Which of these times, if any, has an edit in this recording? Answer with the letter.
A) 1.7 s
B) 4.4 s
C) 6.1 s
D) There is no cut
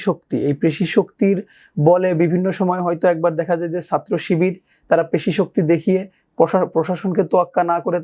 D